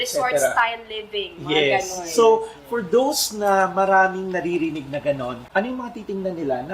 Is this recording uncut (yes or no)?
no